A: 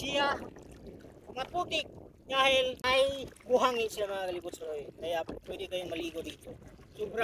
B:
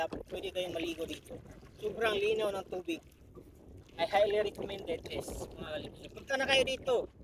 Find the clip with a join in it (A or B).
A